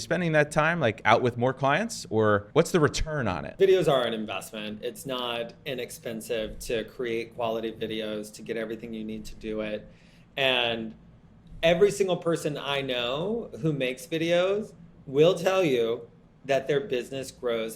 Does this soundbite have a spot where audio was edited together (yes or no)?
yes